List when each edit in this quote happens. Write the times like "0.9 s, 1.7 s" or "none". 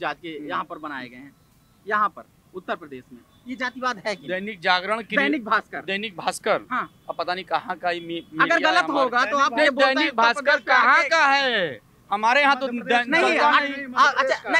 none